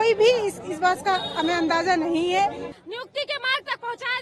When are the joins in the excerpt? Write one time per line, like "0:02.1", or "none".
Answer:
0:02.7